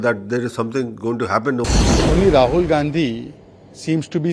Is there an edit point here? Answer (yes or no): yes